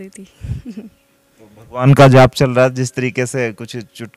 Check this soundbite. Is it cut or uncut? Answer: uncut